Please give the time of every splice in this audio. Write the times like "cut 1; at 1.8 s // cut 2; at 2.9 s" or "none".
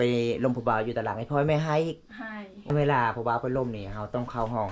cut 1; at 2.5 s